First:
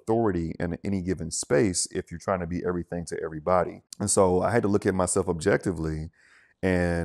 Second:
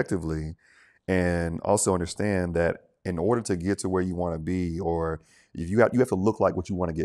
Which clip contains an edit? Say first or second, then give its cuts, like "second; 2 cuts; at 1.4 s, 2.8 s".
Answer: first; 1 cut; at 3.8 s